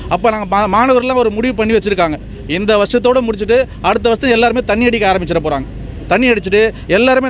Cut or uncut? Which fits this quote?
uncut